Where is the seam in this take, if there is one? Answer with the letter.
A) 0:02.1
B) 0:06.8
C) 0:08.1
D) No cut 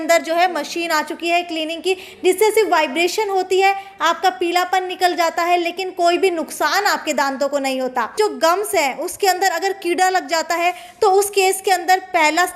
C